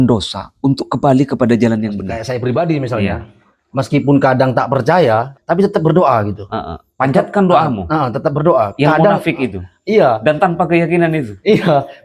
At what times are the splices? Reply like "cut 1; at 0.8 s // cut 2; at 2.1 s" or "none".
cut 1; at 2.2 s // cut 2; at 5.3 s